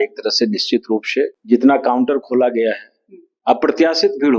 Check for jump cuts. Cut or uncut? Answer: cut